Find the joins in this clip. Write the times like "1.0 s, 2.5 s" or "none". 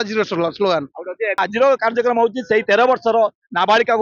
1.4 s